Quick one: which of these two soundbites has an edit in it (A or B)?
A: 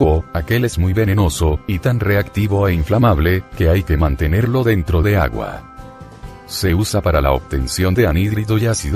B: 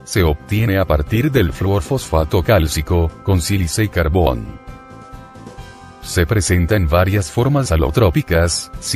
B